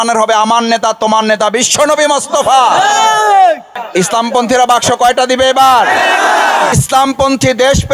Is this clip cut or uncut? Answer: cut